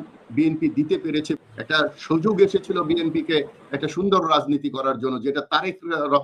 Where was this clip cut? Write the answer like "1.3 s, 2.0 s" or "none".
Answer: 1.4 s